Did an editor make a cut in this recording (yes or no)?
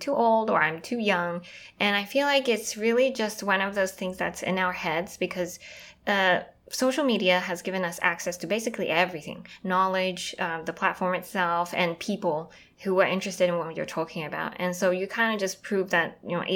no